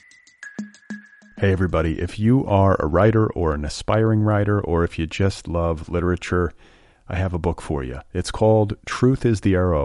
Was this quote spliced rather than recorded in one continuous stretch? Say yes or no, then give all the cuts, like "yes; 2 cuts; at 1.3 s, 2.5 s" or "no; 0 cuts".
yes; 1 cut; at 0.9 s